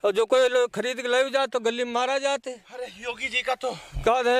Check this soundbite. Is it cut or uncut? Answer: uncut